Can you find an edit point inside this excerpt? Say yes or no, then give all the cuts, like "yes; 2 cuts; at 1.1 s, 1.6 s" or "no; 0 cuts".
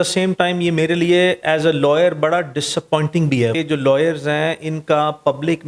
yes; 1 cut; at 3.6 s